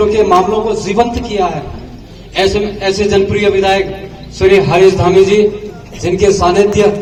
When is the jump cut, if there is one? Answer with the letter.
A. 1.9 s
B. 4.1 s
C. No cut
C